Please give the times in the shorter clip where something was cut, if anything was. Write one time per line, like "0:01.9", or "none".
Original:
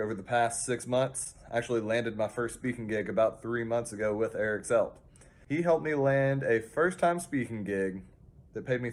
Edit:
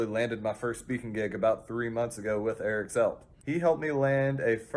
0:03.3

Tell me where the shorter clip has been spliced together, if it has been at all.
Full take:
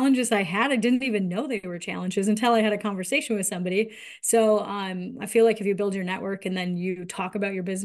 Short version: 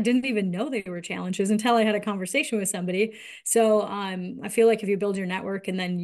none

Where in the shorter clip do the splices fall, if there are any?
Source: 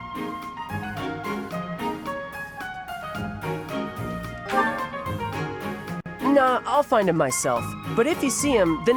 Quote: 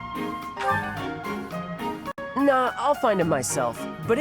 0:02.2

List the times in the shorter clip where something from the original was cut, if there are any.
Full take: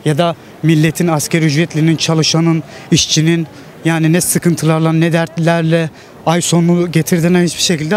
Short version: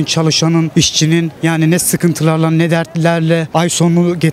0:01.0
0:03.5

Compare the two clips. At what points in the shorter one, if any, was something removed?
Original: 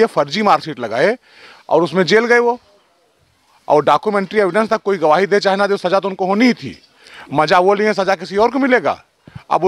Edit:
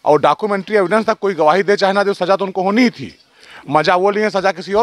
none

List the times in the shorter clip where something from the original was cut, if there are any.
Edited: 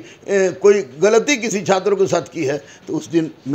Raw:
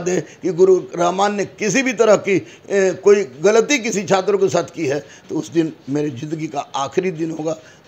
none

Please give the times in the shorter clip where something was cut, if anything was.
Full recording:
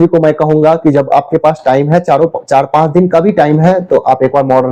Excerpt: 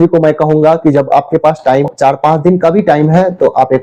0:01.9

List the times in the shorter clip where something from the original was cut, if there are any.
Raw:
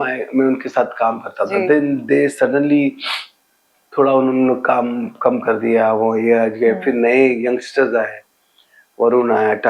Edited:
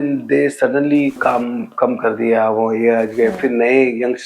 0:01.2

